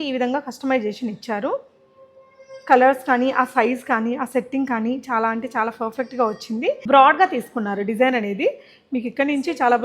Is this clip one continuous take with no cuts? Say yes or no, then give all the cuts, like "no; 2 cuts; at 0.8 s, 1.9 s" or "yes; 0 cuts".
no; 1 cut; at 6.9 s